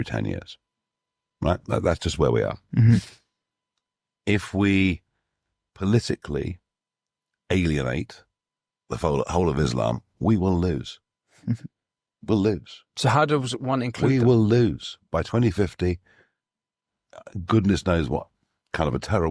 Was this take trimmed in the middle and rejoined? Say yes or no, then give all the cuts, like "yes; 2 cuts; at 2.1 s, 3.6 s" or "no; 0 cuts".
no; 0 cuts